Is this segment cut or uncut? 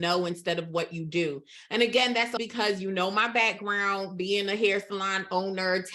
cut